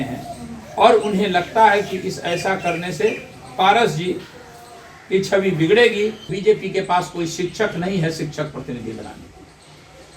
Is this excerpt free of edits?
no; 1 cut; at 6.3 s

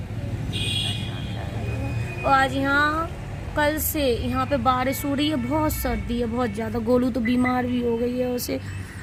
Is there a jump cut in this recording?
no; 0 cuts

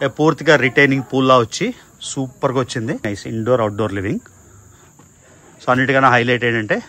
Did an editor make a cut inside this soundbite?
yes; 1 cut; at 3.1 s

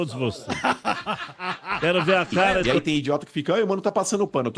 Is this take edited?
yes; 1 cut; at 2.5 s

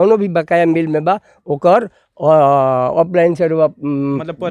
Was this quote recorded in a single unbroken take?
yes; 0 cuts

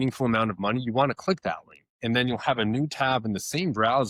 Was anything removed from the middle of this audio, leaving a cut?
no; 0 cuts

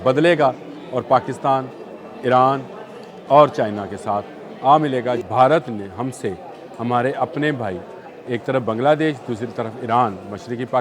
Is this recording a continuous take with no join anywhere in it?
no; 1 cut; at 5.2 s

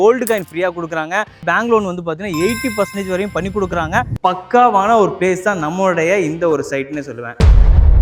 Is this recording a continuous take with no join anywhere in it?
no; 1 cut; at 4.1 s

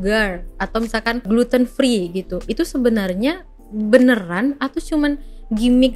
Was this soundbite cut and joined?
yes; 1 cut; at 1.3 s

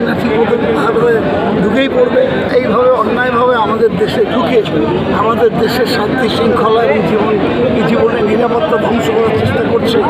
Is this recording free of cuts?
no; 1 cut; at 2.4 s

